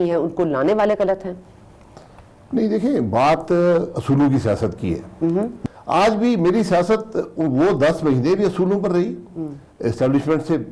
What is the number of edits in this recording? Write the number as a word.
one